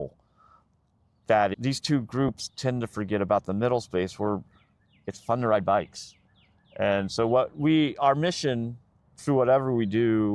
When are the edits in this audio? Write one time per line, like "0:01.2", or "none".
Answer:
0:01.5